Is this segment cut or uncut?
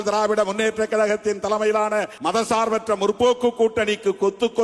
cut